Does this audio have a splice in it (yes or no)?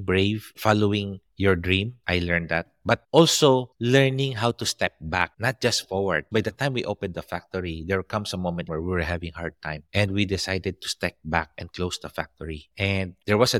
yes